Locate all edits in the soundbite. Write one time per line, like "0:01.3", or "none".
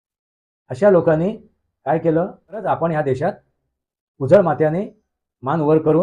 0:02.6